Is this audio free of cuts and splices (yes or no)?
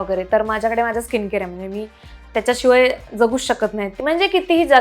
no